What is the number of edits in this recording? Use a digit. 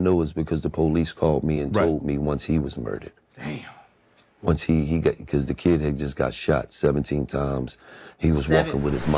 0